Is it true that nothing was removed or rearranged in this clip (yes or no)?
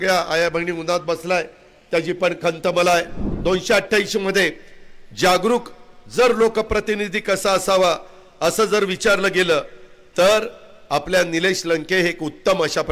no